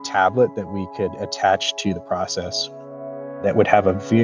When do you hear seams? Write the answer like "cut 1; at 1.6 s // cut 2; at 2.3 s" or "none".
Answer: none